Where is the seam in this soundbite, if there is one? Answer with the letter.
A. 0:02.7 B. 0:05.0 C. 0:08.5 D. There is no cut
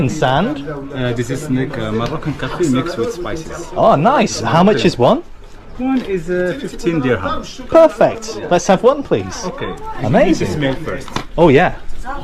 D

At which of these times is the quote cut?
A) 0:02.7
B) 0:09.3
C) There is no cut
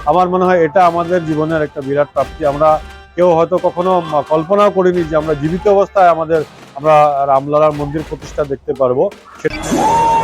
B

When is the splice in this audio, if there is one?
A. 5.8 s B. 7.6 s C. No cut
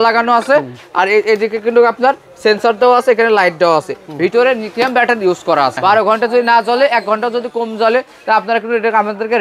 A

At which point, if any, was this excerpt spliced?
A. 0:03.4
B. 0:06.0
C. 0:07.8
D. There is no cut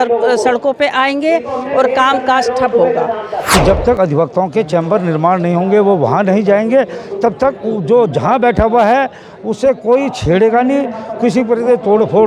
A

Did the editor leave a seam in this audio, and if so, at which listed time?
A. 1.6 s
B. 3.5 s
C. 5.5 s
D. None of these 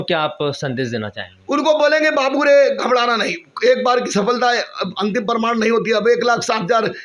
D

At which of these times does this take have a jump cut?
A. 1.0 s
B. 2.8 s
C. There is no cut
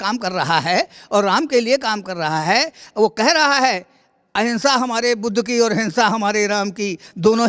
C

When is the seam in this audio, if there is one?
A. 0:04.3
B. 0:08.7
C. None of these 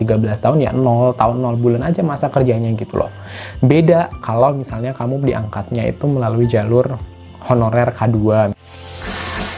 B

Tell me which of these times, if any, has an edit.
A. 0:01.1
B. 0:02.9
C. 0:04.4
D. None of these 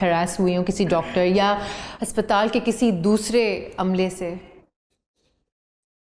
D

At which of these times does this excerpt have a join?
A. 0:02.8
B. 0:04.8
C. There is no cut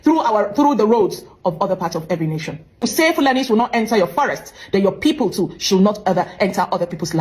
A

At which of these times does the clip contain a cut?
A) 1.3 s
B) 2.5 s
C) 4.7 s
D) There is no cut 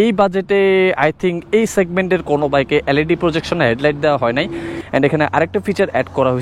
C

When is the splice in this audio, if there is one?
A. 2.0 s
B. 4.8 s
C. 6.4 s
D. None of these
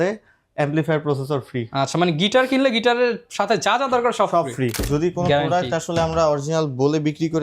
B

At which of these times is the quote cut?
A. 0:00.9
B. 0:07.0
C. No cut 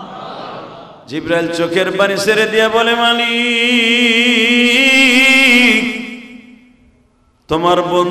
A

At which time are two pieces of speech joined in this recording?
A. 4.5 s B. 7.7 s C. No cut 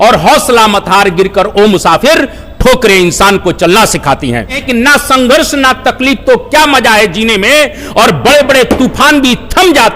A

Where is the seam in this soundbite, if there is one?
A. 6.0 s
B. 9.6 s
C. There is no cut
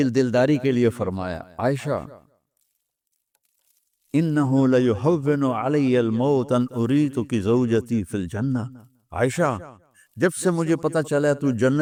C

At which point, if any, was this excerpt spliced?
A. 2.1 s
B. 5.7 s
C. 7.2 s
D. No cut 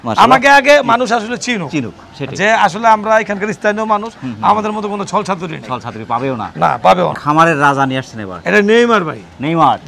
C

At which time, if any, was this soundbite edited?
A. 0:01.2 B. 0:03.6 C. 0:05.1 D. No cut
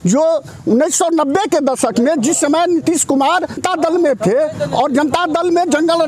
B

